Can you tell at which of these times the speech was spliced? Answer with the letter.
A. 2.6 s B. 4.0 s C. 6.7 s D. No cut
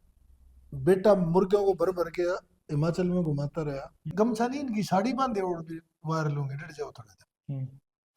B